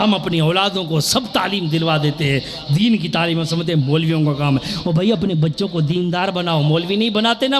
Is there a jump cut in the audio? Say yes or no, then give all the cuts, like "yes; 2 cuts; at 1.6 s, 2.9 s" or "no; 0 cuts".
no; 0 cuts